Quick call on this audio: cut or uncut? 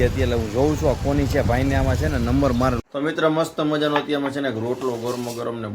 cut